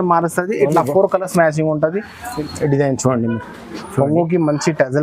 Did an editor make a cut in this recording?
yes; 1 cut; at 2.2 s

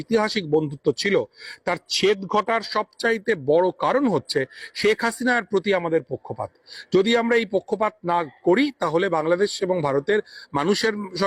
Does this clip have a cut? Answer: no; 0 cuts

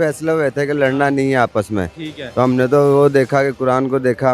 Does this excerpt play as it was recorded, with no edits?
yes; 0 cuts

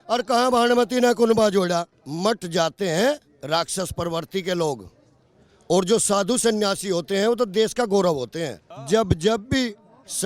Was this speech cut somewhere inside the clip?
yes; 2 cuts; at 2.0 s, 8.8 s

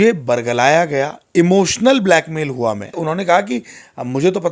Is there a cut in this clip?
yes; 1 cut; at 3.0 s

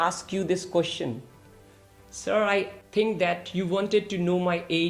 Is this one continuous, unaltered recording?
no; 1 cut; at 2.8 s

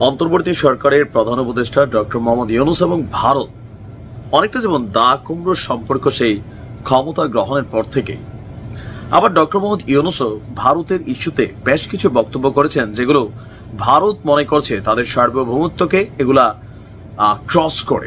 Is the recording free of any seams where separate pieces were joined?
yes; 0 cuts

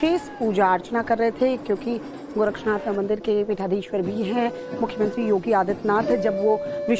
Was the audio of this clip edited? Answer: no; 0 cuts

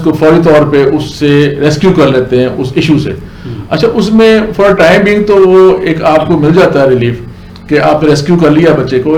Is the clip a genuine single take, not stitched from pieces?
yes; 0 cuts

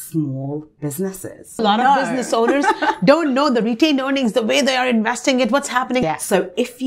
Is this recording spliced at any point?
yes; 2 cuts; at 1.6 s, 6.0 s

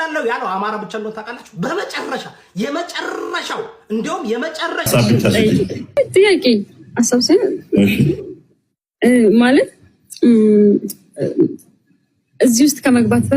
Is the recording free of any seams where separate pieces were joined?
no; 1 cut; at 4.8 s

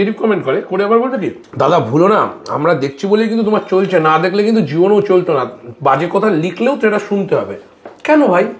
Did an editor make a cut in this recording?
yes; 1 cut; at 1.4 s

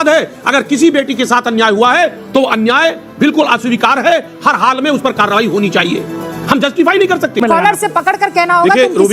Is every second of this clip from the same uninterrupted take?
no; 1 cut; at 7.4 s

